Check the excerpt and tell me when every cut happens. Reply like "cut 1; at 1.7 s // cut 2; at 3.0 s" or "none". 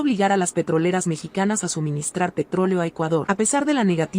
cut 1; at 3.2 s